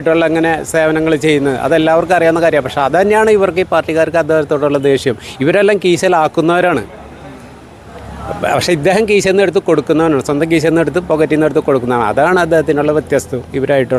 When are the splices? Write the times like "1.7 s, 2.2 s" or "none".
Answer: none

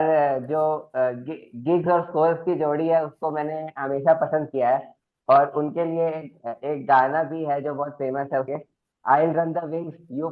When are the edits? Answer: 8.5 s

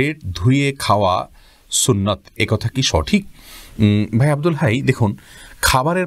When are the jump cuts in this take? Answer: none

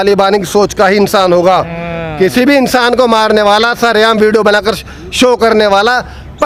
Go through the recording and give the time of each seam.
none

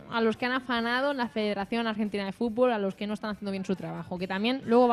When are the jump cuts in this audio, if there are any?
1.2 s

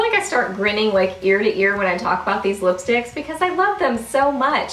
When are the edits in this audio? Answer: none

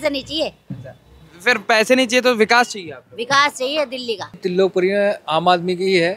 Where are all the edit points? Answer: 4.3 s

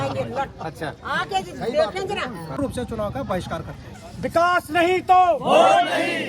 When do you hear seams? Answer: 2.6 s

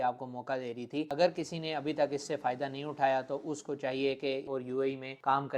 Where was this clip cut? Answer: 1.1 s, 4.5 s

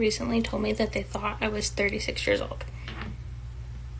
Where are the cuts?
none

